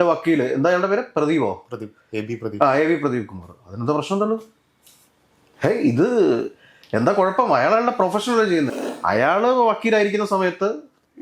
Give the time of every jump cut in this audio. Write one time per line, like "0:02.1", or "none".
0:08.8

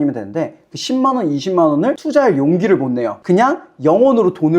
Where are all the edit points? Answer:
0:02.0

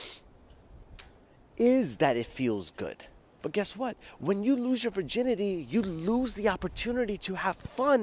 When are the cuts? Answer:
0:03.3

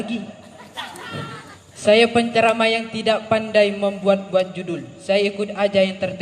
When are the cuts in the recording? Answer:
0:01.6

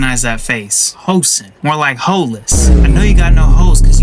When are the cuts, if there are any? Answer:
none

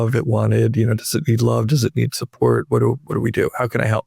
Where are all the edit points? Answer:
none

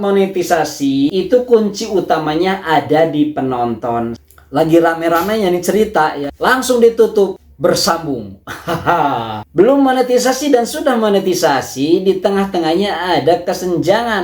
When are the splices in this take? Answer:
0:01.1
0:04.2
0:09.4

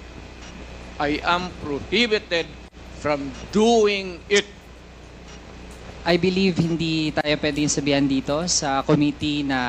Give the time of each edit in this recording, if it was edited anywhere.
none

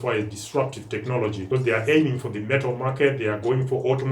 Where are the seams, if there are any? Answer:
0:01.4

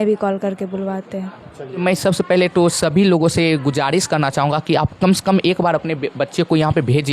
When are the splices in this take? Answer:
0:01.6

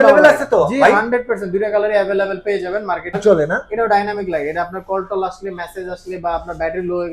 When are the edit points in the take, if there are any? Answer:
0:03.2

